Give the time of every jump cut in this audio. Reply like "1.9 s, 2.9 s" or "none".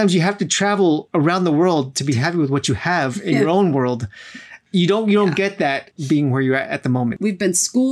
1.1 s, 4.5 s, 5.9 s, 7.1 s